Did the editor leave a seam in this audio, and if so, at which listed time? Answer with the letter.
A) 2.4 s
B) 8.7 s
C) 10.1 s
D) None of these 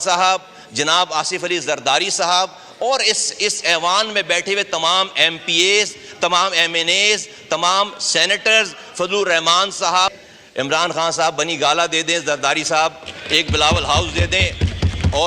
C